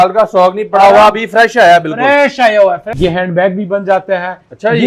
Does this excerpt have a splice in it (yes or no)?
yes